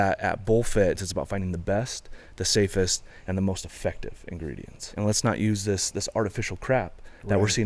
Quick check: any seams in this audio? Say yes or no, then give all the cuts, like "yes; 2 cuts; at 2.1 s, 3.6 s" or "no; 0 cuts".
yes; 2 cuts; at 1.0 s, 4.9 s